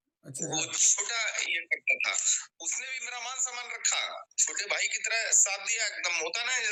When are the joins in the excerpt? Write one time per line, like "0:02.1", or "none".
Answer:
none